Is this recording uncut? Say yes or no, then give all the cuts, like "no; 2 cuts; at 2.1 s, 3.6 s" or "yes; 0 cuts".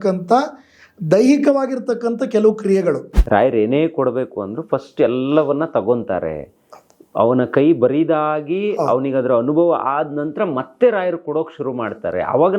no; 1 cut; at 3.1 s